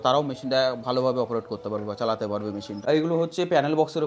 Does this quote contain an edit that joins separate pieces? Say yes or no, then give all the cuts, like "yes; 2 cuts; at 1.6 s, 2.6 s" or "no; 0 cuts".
yes; 1 cut; at 2.7 s